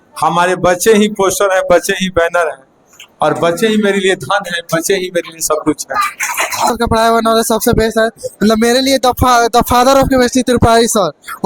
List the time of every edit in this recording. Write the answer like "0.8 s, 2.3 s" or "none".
6.7 s